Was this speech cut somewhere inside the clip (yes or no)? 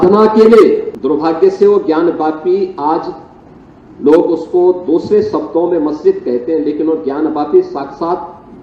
yes